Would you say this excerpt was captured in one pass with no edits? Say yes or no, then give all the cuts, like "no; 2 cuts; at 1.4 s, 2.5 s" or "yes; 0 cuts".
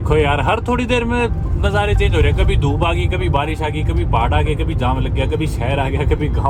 yes; 0 cuts